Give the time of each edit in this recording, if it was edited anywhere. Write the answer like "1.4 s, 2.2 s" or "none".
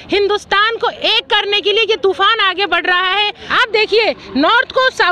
3.4 s